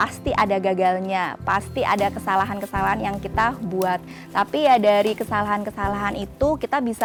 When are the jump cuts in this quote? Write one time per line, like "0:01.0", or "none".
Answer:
none